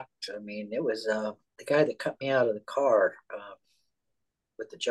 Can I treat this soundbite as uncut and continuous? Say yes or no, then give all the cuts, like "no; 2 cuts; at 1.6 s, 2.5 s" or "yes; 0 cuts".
no; 1 cut; at 1.5 s